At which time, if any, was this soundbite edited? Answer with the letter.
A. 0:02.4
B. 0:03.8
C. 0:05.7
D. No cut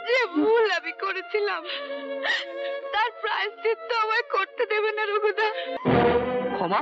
C